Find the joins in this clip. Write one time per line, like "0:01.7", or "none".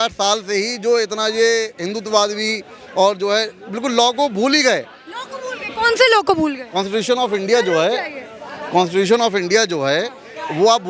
none